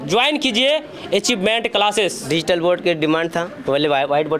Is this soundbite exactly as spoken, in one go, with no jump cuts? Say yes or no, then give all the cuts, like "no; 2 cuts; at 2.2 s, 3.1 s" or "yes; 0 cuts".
no; 1 cut; at 2.3 s